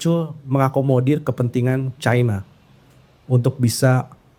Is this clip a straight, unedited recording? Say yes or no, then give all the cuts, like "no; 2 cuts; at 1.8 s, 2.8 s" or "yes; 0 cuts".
yes; 0 cuts